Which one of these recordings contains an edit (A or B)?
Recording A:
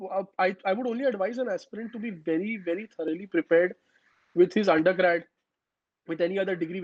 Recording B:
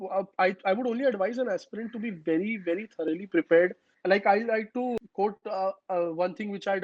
B